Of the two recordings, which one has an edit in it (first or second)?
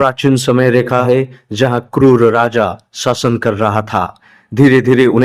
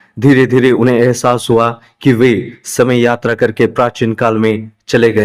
first